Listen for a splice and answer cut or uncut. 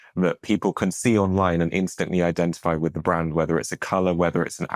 uncut